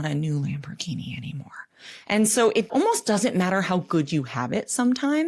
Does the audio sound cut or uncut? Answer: cut